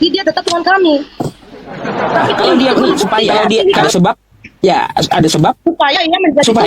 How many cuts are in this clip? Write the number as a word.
one